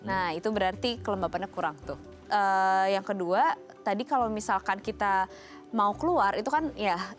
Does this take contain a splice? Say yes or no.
yes